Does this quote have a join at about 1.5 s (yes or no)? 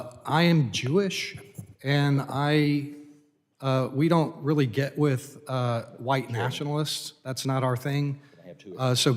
no